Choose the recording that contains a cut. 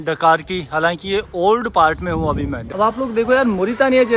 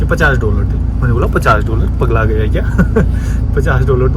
first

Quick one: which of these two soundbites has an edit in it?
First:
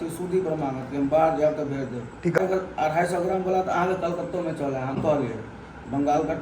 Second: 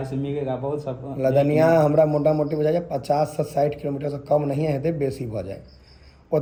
first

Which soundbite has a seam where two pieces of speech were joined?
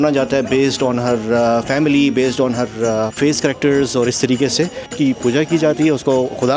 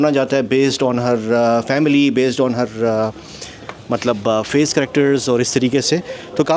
first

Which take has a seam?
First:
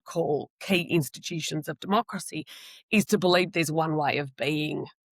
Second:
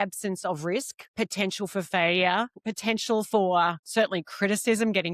second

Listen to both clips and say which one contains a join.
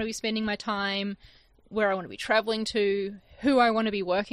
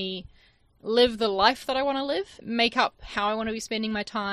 second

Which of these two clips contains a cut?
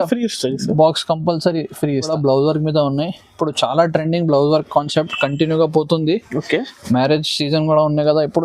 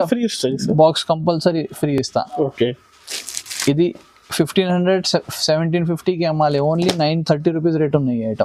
first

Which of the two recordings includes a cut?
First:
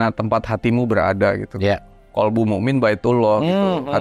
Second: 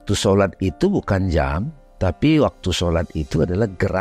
first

